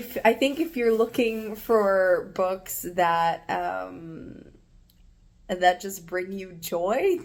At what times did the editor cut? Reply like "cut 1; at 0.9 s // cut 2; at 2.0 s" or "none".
none